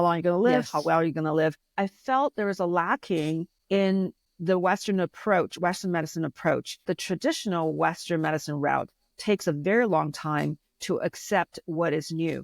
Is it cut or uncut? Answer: cut